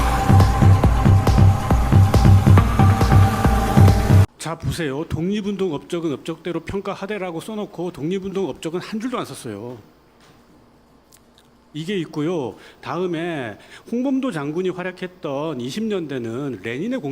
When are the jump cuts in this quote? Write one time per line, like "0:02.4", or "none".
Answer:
0:04.3